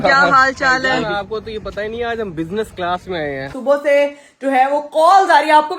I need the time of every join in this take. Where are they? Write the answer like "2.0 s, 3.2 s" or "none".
3.5 s

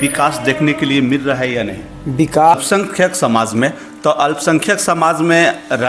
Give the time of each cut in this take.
2.5 s

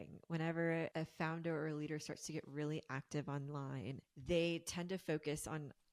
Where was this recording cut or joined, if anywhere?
0.9 s, 4.1 s

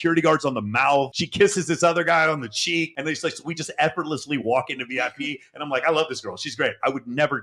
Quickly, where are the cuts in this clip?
none

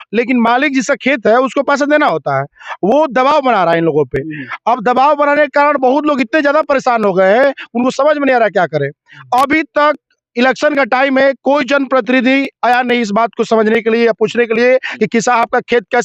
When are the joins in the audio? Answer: none

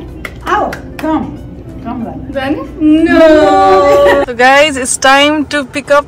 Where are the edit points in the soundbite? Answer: 4.2 s

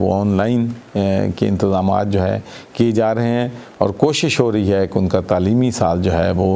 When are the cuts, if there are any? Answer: none

